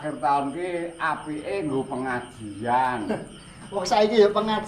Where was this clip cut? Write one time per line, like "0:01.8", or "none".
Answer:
none